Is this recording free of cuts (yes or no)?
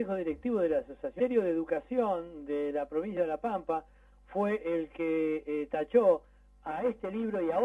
yes